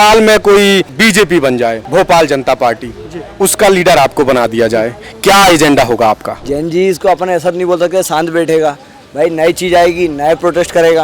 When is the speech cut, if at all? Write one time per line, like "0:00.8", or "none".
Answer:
0:06.4